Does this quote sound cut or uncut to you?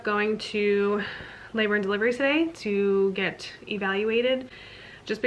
uncut